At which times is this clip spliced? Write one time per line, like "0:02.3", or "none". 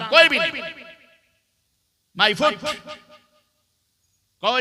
none